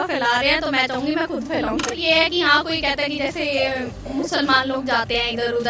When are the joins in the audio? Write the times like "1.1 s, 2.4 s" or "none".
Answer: 2.0 s